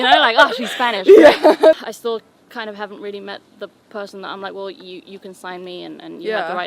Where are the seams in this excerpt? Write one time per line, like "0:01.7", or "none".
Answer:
0:01.8